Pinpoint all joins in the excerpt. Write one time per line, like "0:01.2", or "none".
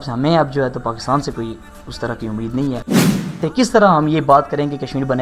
0:03.3